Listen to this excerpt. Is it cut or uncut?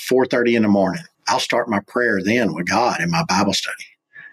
cut